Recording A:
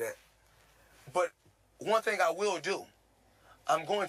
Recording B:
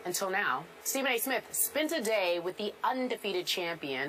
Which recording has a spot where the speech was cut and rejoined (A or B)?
A